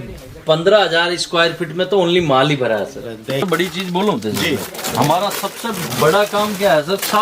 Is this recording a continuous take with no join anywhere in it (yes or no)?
no